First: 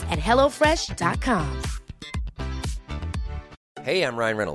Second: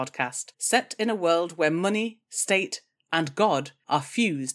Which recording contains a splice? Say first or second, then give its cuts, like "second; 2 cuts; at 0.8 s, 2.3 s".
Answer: first; 1 cut; at 3.6 s